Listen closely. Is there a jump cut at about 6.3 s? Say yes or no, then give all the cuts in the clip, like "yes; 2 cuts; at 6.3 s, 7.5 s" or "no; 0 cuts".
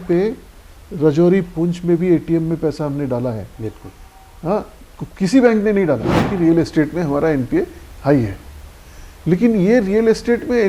yes; 1 cut; at 6.3 s